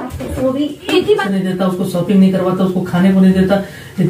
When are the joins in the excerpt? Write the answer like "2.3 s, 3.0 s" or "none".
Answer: 1.3 s